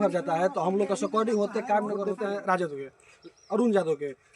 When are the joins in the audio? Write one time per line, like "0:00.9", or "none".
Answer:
0:02.1

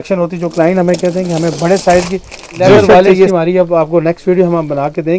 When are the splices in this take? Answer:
0:03.3

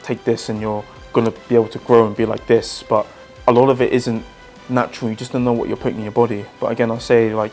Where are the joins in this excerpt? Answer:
0:03.2
0:06.5

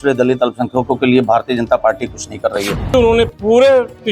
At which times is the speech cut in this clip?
0:02.9

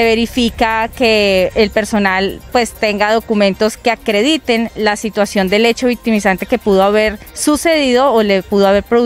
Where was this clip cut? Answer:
none

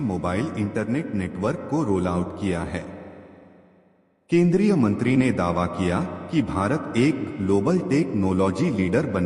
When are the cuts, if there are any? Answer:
none

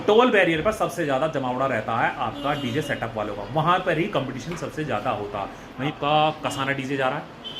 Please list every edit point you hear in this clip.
0:05.9

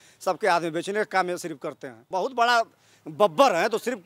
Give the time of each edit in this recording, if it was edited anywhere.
0:02.0

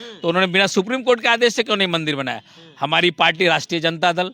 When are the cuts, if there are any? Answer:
none

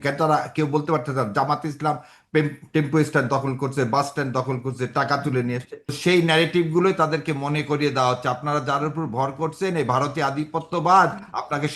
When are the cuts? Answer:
0:06.0

